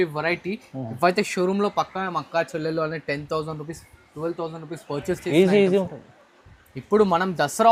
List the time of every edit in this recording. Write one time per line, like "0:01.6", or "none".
none